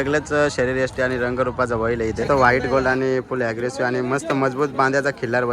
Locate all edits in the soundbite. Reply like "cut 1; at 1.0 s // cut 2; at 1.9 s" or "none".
cut 1; at 2.2 s